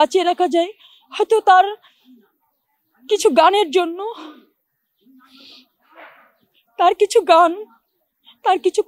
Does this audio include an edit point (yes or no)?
no